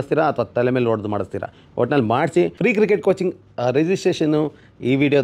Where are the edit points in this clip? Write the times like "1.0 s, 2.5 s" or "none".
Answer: 2.5 s